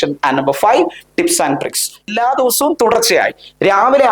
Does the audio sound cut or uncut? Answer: cut